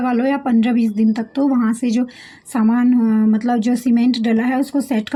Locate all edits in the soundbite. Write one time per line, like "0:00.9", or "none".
none